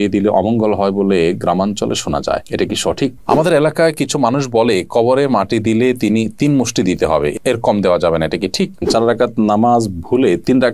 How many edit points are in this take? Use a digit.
2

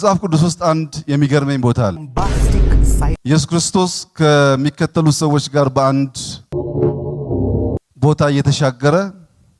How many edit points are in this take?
0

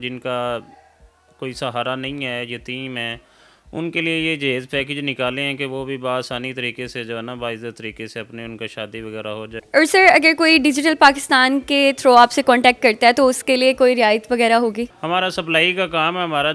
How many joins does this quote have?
2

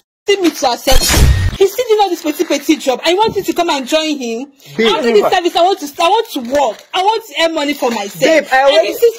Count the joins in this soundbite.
0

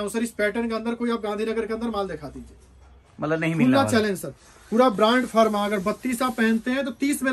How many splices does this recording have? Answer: 0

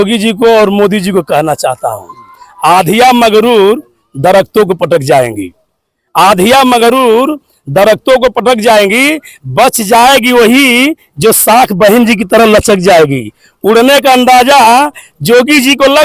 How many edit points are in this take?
0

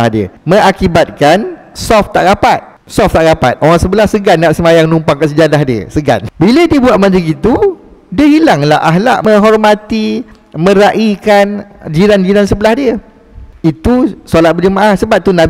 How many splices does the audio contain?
2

